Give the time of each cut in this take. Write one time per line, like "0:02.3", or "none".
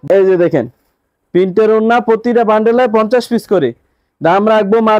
none